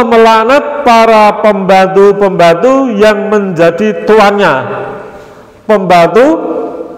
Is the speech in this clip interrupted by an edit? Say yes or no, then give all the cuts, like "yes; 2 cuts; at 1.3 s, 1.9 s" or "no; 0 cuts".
no; 0 cuts